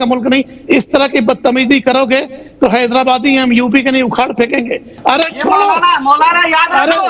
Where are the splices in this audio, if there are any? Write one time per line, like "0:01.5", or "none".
0:04.9